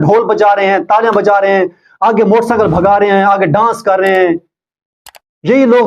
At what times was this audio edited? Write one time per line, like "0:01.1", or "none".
none